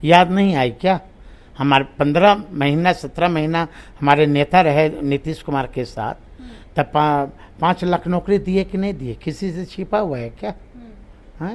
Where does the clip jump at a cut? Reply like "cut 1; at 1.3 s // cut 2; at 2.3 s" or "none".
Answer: none